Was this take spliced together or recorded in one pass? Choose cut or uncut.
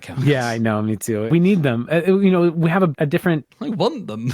cut